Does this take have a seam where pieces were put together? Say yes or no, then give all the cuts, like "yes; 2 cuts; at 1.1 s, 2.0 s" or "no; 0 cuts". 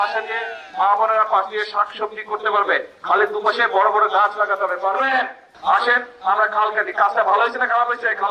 yes; 1 cut; at 5.5 s